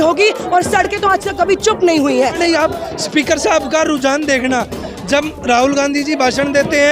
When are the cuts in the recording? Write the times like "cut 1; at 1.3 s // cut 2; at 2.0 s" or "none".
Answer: cut 1; at 2.3 s